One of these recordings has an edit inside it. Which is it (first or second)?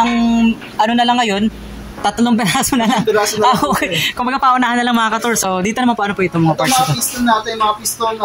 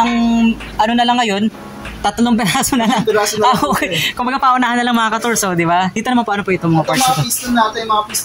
first